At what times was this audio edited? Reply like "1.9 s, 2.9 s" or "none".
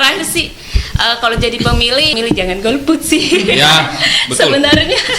2.1 s